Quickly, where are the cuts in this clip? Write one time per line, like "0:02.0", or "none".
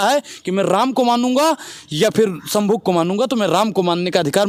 none

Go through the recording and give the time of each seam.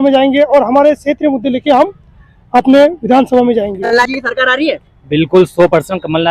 0:04.1

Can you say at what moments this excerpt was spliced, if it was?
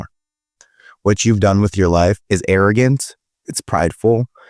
0:02.2

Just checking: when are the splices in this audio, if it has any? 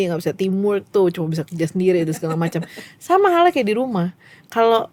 none

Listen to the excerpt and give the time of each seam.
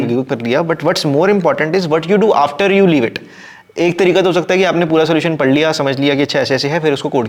none

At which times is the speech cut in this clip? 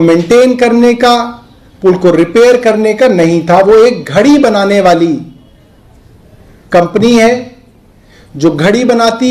none

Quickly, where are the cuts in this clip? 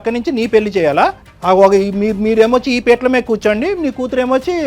0:01.3

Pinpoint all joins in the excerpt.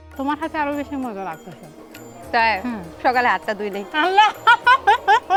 none

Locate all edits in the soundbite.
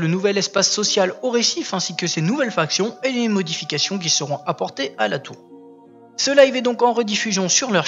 none

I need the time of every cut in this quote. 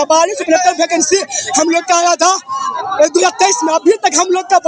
none

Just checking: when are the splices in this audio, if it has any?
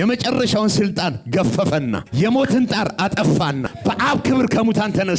0:02.0
0:03.7

